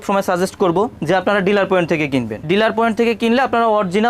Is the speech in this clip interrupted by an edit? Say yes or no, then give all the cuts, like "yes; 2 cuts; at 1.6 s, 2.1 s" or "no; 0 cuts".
yes; 1 cut; at 2.4 s